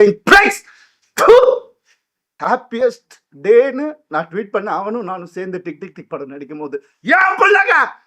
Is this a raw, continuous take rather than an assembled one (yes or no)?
no